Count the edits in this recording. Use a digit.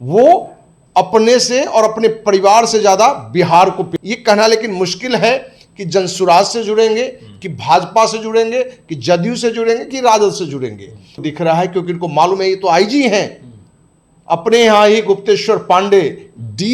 2